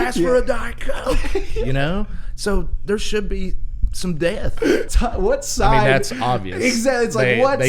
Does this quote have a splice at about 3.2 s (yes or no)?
no